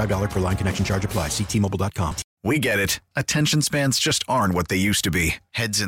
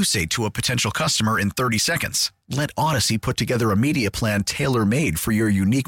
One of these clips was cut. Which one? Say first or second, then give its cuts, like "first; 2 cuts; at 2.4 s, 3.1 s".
first; 1 cut; at 2.3 s